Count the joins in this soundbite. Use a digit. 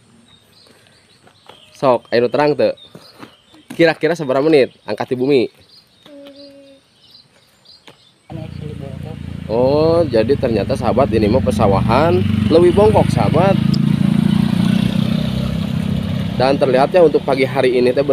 1